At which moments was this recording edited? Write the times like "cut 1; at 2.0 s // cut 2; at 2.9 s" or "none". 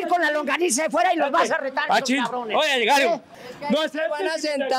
cut 1; at 3.3 s